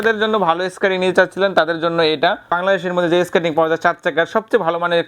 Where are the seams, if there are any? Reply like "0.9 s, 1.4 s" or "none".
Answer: 2.5 s